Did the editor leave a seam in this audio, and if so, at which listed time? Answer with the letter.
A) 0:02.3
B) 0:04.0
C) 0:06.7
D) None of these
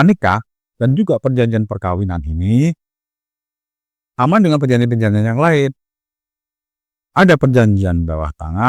D